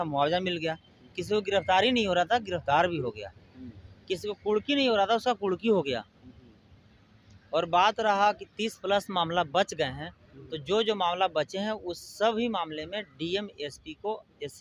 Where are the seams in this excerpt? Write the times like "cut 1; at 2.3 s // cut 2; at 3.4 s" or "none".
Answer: none